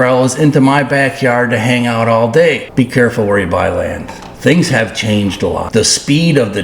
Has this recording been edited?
yes; 2 cuts; at 2.6 s, 5.6 s

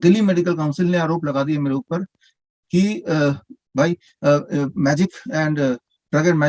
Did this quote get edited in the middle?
no; 0 cuts

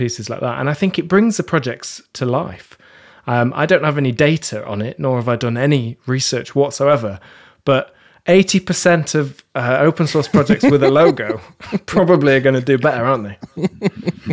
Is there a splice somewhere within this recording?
no; 0 cuts

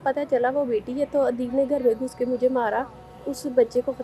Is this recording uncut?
yes; 0 cuts

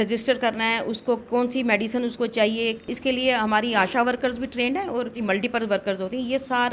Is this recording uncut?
no; 2 cuts; at 2.8 s, 5.2 s

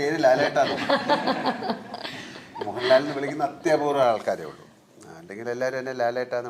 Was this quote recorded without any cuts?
yes; 0 cuts

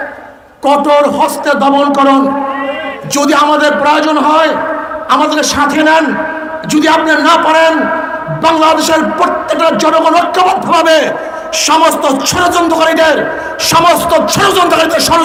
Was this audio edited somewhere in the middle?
no; 0 cuts

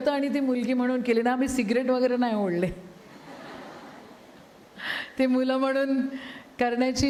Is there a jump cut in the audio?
no; 0 cuts

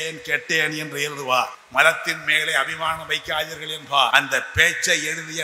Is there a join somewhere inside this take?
yes; 2 cuts; at 1.6 s, 4.1 s

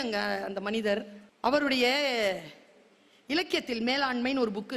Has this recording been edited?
yes; 1 cut; at 1.2 s

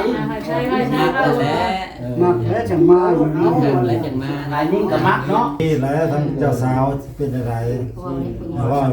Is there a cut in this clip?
yes; 1 cut; at 5.6 s

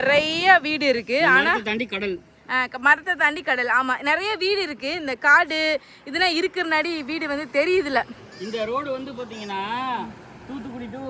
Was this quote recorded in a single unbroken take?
yes; 0 cuts

